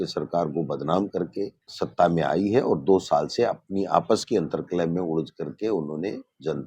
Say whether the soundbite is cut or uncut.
uncut